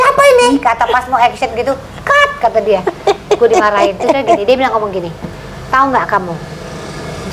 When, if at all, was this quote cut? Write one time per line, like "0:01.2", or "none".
none